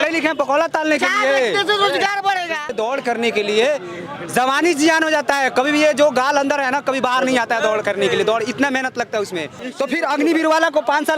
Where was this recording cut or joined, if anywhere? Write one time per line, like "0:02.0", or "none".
0:02.8
0:09.6